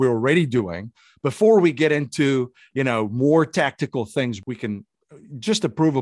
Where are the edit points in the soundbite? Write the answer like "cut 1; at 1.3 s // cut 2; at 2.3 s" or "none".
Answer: cut 1; at 4.4 s

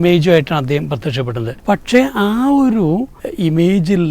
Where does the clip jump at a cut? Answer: cut 1; at 1.5 s // cut 2; at 3.2 s

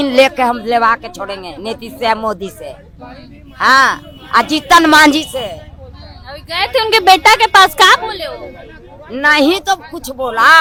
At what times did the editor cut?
none

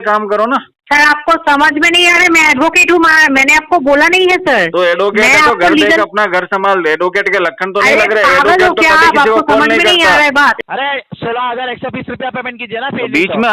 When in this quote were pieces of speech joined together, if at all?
cut 1; at 10.6 s

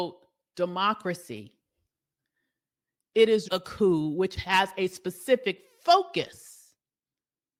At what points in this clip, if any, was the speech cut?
none

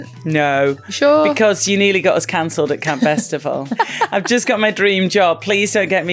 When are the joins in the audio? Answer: cut 1; at 3.7 s

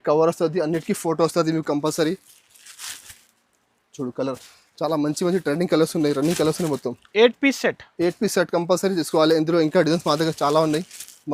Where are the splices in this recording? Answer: none

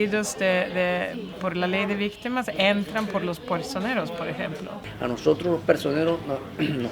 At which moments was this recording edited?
cut 1; at 4.8 s

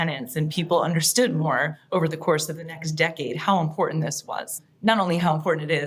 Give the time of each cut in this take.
none

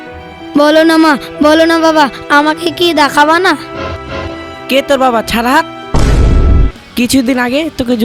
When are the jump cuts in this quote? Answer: none

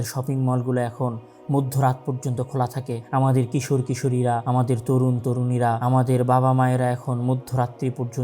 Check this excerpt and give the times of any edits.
cut 1; at 3.0 s // cut 2; at 4.4 s // cut 3; at 5.8 s

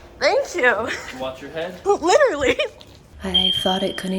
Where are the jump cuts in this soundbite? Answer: cut 1; at 1.8 s // cut 2; at 3.1 s

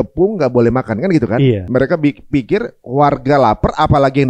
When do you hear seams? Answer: cut 1; at 1.6 s

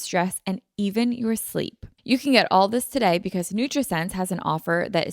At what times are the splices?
cut 1; at 1.9 s

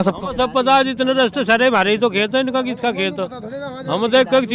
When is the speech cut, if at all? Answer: none

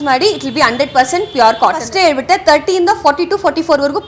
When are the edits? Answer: cut 1; at 1.8 s

